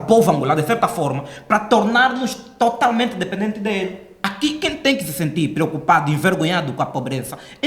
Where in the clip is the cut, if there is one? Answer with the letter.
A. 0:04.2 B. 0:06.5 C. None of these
A